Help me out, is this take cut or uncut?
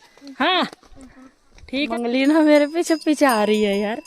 cut